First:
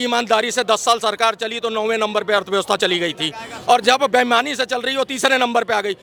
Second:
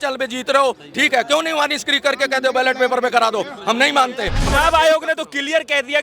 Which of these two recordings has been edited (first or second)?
second